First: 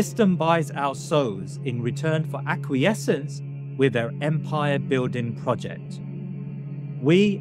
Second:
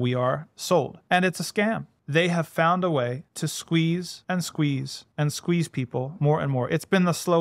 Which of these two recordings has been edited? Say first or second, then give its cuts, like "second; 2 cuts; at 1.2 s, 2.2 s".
second; 5 cuts; at 1.0 s, 1.9 s, 3.3 s, 4.1 s, 5.0 s